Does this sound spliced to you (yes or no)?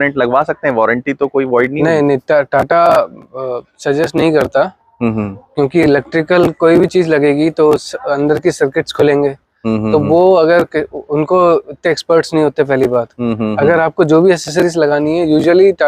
no